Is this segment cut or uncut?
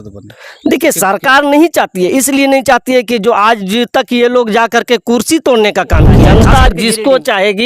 cut